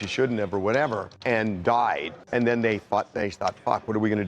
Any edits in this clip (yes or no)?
yes